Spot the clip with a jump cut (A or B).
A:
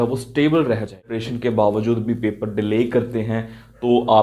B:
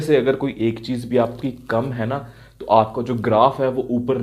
A